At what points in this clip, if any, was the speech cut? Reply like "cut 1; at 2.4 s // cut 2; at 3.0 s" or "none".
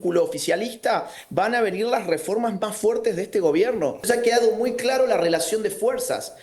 cut 1; at 4.1 s